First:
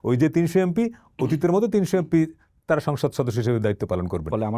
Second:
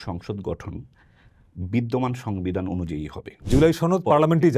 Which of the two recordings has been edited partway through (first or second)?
second